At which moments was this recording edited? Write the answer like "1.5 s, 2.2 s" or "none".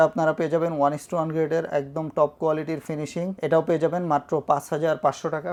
none